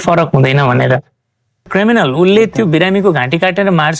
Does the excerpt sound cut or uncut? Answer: cut